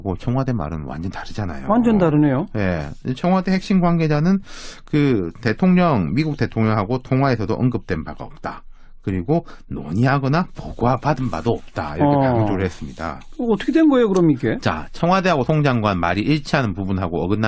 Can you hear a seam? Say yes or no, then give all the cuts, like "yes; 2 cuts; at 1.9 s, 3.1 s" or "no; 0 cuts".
no; 0 cuts